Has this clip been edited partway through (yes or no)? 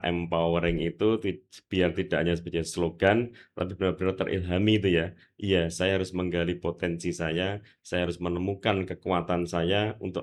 no